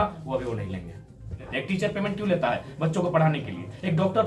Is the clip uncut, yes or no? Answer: no